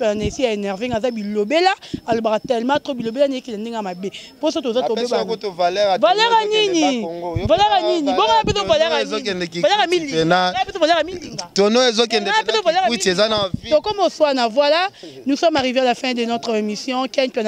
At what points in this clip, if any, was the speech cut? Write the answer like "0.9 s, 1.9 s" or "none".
none